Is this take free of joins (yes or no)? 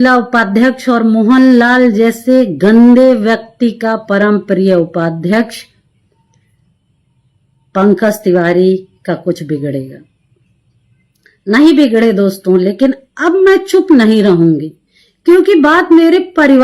yes